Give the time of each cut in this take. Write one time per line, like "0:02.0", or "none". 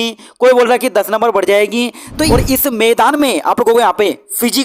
0:02.3